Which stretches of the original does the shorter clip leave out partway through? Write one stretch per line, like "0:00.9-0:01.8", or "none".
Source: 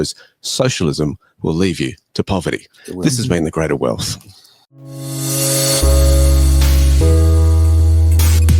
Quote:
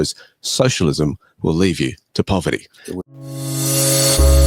0:02.8-0:04.4